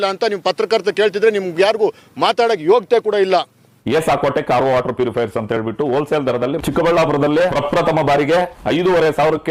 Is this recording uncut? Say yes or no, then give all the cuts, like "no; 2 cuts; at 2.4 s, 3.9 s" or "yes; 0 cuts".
yes; 0 cuts